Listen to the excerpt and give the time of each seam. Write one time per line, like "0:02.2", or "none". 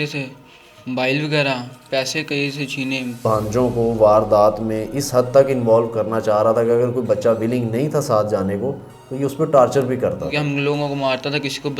0:03.2
0:10.3